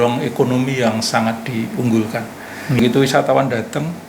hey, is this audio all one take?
yes; 0 cuts

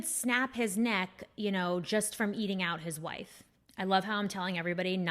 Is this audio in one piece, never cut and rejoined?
no; 1 cut; at 3.5 s

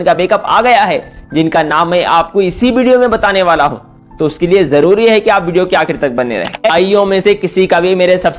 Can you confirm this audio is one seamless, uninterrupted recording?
no; 1 cut; at 6.7 s

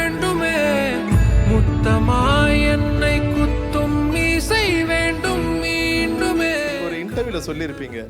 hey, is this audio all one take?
yes; 0 cuts

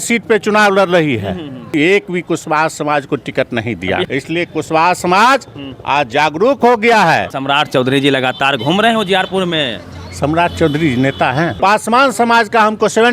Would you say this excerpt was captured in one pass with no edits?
no; 4 cuts; at 1.7 s, 4.0 s, 7.3 s, 11.5 s

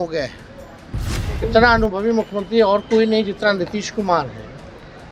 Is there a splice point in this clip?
yes; 1 cut; at 1.2 s

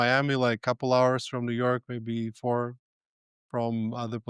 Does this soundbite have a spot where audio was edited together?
no; 0 cuts

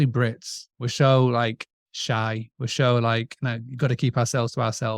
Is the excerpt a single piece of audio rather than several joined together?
yes; 0 cuts

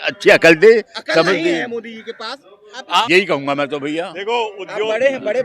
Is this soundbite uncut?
no; 1 cut; at 3.0 s

